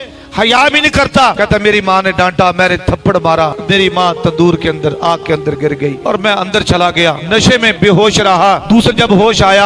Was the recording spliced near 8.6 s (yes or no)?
yes